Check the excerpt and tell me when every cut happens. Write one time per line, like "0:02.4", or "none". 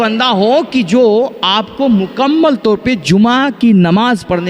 none